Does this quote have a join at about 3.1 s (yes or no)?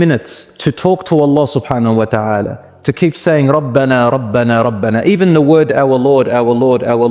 no